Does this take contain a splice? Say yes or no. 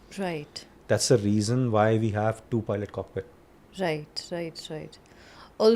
no